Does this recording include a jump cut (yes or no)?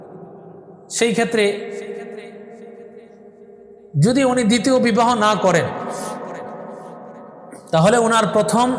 no